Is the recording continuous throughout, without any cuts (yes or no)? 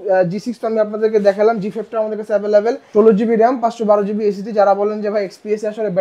no